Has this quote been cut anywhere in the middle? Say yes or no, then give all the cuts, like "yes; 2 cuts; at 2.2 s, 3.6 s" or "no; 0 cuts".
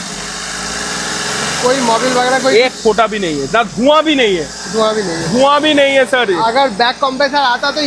no; 0 cuts